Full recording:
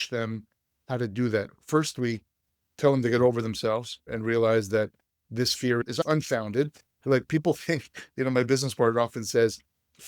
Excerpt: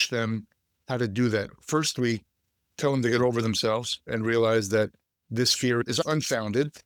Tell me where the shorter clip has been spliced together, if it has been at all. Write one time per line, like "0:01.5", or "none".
none